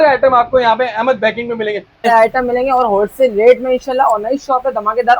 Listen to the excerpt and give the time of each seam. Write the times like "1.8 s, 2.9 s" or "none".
2.1 s